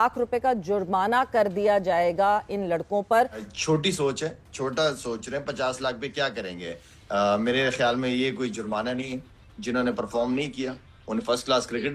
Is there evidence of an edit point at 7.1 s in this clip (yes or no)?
no